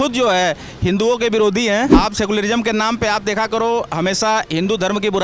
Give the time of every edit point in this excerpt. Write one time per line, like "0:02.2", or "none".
0:01.9